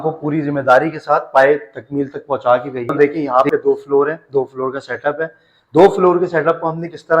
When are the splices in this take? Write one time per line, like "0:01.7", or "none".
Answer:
0:02.9